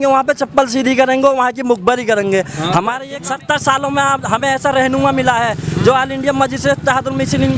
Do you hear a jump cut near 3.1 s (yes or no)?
yes